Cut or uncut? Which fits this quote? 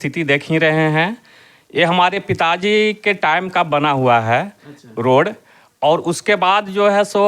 uncut